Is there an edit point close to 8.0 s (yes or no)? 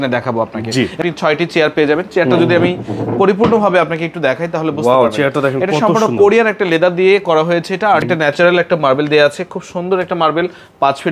yes